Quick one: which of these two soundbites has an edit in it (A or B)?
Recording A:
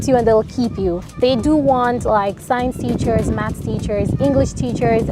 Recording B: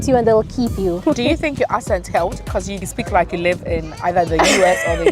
B